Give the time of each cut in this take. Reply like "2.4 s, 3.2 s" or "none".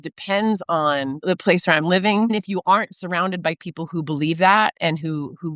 1.2 s, 2.3 s